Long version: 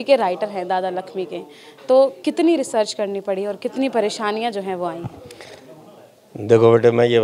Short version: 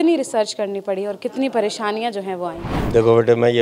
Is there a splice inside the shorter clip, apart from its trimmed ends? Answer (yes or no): yes